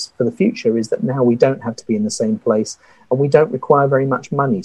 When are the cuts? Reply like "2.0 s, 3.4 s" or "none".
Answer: none